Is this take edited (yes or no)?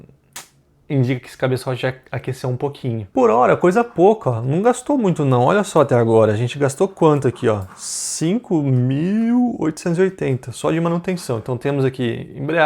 yes